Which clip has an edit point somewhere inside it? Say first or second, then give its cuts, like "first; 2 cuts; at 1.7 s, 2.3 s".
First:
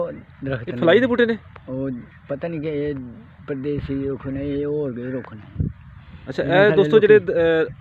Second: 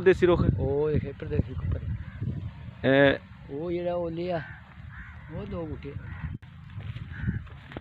second; 1 cut; at 6.3 s